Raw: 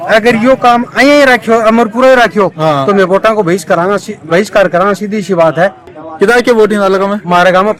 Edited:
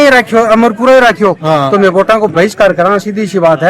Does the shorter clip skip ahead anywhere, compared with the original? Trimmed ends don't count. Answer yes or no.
yes